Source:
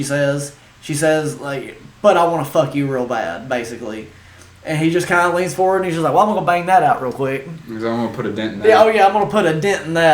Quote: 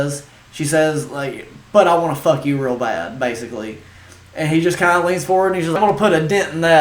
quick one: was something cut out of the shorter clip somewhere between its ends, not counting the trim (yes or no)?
yes